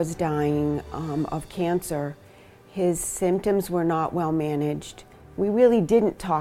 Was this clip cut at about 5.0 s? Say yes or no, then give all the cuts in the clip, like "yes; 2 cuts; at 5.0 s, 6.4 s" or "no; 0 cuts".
no; 0 cuts